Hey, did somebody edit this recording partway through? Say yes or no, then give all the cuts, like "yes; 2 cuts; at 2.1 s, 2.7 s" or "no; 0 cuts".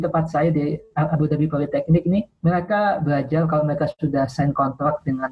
yes; 1 cut; at 2.3 s